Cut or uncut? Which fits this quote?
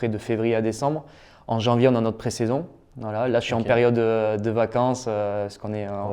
uncut